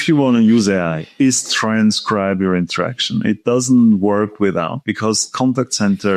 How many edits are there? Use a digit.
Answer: 0